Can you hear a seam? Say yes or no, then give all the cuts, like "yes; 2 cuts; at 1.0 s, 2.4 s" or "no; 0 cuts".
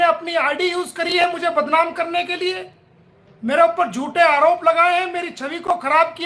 no; 0 cuts